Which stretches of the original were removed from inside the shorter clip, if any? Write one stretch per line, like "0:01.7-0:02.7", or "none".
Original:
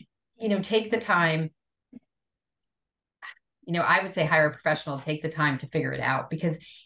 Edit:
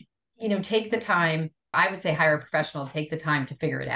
0:01.7-0:03.9